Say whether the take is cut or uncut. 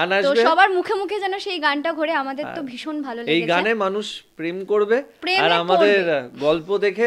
uncut